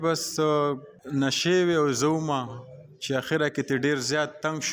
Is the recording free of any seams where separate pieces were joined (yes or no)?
no